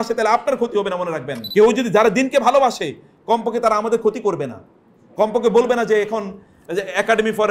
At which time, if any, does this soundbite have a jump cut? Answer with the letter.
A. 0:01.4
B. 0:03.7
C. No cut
A